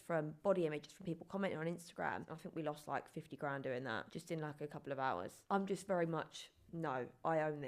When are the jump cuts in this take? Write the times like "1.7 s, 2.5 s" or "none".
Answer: 2.3 s, 5.4 s

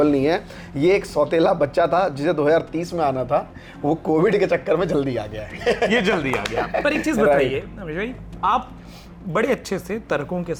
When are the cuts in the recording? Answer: none

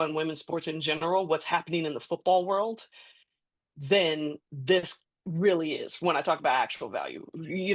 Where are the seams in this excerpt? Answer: none

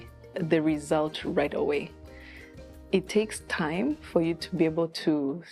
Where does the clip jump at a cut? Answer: none

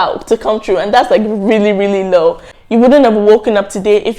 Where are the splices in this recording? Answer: 2.6 s

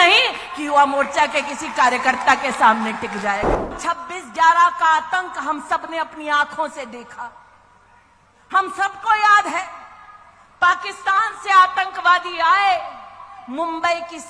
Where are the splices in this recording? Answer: 3.8 s

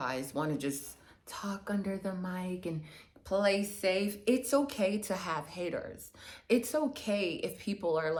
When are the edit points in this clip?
none

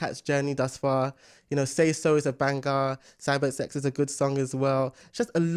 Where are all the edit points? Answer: none

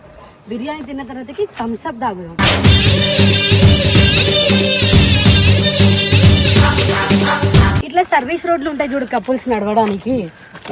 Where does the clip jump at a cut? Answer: 7.8 s

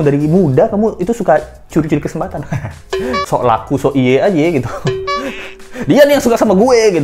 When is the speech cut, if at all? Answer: 3.2 s

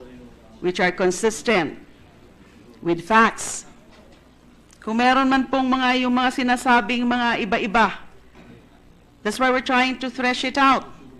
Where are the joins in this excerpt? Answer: 7.2 s

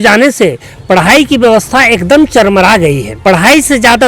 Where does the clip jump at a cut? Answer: 3.1 s

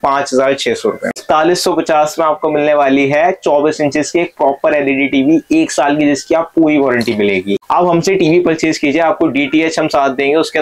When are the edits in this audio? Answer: 1.2 s, 7.6 s

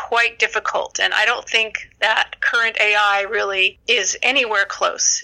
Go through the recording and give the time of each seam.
3.7 s

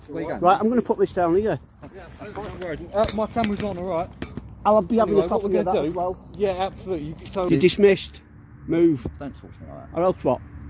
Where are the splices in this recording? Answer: 7.5 s

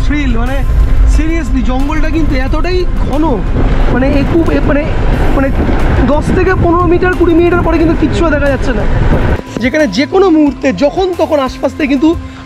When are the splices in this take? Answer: 9.3 s

